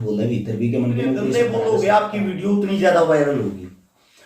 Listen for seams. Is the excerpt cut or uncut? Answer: cut